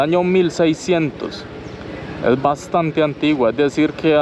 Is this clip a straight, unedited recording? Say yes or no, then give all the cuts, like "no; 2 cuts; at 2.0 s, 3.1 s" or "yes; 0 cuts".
yes; 0 cuts